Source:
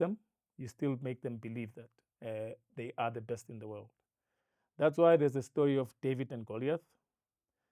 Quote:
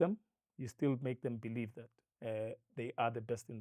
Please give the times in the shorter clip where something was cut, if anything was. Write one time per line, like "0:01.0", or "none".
none